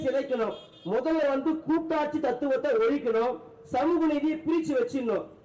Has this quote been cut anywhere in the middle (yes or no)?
no